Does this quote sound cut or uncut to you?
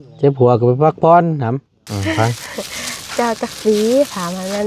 cut